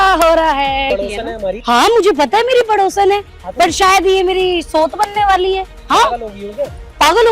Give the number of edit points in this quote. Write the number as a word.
two